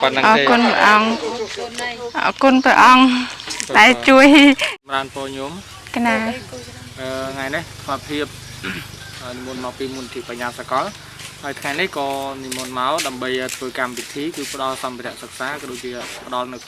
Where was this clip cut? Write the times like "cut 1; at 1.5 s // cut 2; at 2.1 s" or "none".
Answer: cut 1; at 4.8 s